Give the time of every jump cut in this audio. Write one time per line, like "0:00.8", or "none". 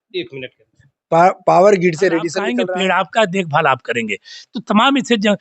0:02.4